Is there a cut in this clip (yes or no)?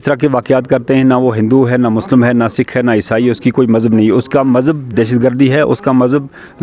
no